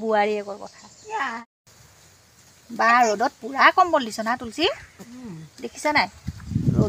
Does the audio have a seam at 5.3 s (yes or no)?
no